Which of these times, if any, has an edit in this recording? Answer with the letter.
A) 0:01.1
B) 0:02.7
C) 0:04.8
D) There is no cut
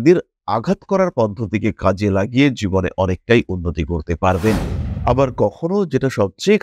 C